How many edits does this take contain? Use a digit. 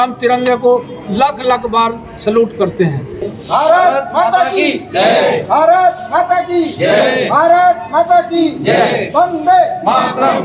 1